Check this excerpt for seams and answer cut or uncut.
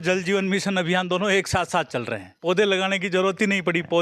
uncut